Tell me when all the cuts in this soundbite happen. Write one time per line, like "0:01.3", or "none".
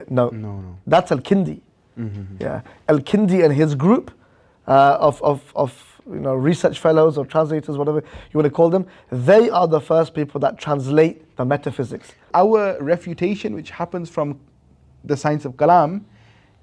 0:12.3